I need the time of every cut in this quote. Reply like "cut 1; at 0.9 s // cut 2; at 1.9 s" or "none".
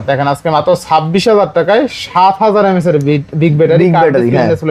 none